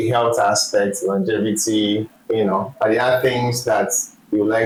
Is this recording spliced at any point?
no; 0 cuts

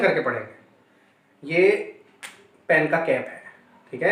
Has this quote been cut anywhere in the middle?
no; 0 cuts

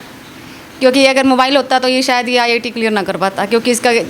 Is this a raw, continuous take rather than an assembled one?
yes; 0 cuts

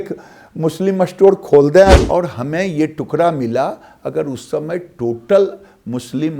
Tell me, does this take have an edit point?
yes; 1 cut; at 2.0 s

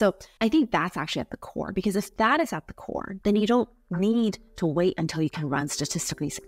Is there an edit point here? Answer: yes; 1 cut; at 3.1 s

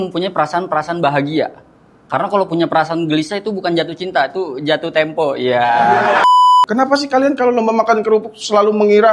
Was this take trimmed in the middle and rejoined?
yes; 1 cut; at 6.3 s

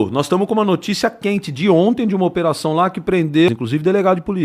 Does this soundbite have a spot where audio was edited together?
yes; 1 cut; at 3.5 s

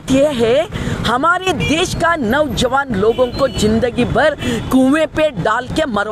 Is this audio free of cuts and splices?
yes; 0 cuts

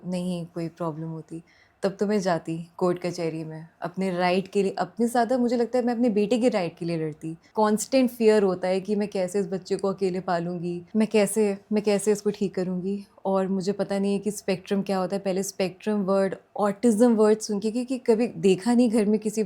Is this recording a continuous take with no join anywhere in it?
no; 2 cuts; at 7.4 s, 10.8 s

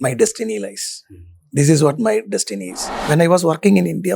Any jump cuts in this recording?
yes; 1 cut; at 3.0 s

